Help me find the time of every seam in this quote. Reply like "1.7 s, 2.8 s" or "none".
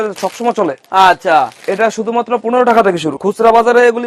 3.2 s